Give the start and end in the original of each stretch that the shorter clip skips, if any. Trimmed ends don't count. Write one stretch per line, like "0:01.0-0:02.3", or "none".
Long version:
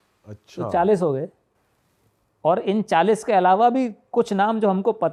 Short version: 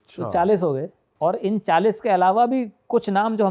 0:01.4-0:02.2